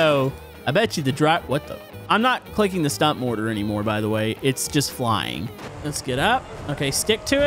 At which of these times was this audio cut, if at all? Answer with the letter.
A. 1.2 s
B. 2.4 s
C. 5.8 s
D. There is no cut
C